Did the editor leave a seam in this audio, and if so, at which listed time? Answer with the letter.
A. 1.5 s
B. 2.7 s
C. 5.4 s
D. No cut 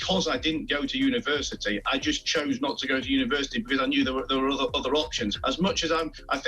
C